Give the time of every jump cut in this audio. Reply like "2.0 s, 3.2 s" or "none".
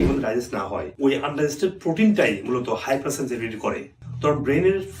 4.0 s